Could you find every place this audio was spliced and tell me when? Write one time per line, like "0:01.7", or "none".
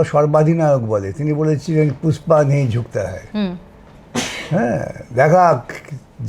none